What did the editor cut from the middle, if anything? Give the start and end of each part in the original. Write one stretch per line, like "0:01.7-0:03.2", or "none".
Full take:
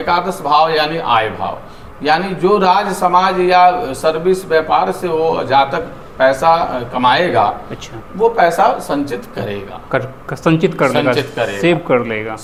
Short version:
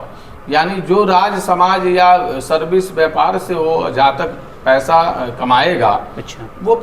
none